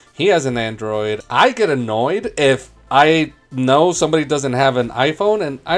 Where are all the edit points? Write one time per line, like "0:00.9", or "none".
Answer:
0:01.2